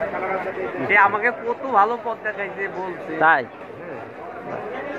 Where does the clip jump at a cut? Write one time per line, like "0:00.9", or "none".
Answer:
none